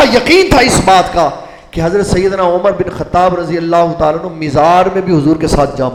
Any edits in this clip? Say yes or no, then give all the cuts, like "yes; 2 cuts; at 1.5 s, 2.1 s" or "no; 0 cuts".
no; 0 cuts